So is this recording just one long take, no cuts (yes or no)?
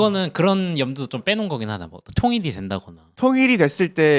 no